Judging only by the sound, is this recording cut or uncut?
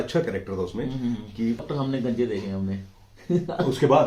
cut